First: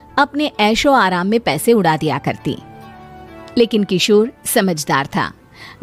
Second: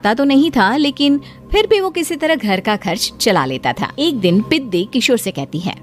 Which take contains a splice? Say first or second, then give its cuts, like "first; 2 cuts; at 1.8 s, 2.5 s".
second; 1 cut; at 3.9 s